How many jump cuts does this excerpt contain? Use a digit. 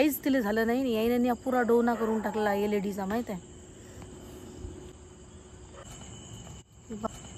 0